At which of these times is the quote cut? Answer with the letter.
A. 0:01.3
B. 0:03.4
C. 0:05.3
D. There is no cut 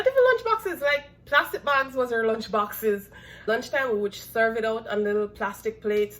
B